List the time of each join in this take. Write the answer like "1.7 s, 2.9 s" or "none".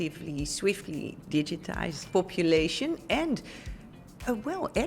2.0 s

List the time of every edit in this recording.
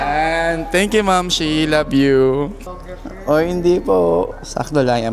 2.6 s

